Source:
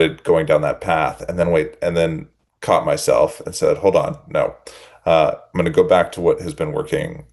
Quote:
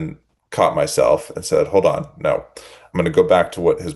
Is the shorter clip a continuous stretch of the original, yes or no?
no